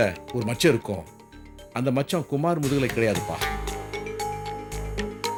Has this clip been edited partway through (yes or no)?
no